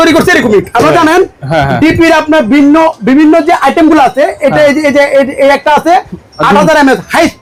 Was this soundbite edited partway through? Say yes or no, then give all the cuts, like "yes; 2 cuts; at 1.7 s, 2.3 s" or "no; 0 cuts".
no; 0 cuts